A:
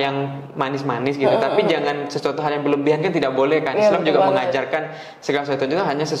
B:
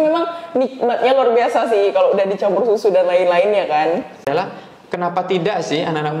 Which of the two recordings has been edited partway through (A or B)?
B